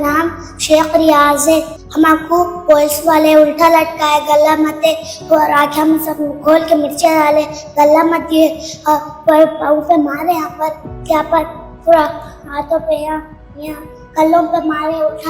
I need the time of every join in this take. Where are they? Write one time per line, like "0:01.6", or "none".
none